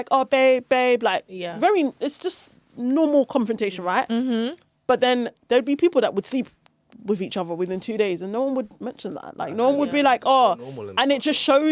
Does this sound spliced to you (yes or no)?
no